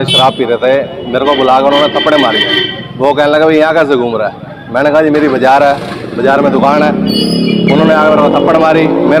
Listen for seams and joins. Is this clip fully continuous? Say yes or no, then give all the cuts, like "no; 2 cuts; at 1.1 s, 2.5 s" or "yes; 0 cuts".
yes; 0 cuts